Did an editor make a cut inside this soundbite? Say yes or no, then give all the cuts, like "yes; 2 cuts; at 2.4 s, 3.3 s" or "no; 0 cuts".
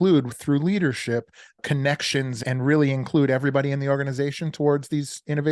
yes; 2 cuts; at 1.6 s, 2.4 s